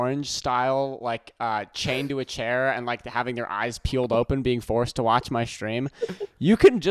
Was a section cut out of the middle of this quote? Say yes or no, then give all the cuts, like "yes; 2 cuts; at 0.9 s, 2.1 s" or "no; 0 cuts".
no; 0 cuts